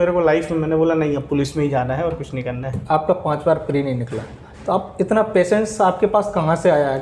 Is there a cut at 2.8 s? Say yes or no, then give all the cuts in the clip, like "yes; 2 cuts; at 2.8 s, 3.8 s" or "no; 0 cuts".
yes; 1 cut; at 2.8 s